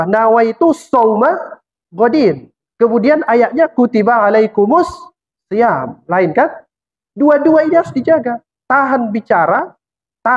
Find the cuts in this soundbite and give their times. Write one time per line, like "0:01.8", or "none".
none